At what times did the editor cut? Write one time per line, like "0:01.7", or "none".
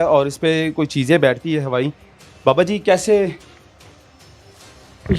none